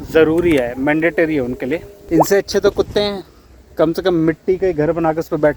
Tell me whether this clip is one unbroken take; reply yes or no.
no